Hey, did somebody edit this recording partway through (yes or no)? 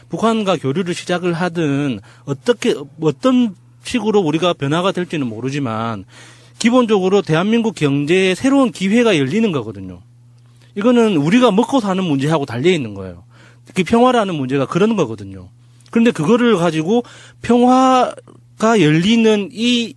yes